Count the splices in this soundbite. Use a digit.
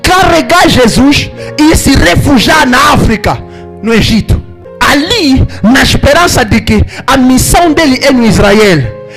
1